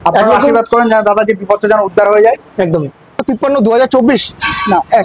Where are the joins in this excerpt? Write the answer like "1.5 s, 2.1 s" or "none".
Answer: 3.2 s